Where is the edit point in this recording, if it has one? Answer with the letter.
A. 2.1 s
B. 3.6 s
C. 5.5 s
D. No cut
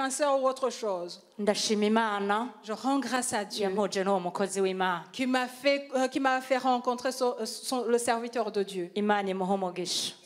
D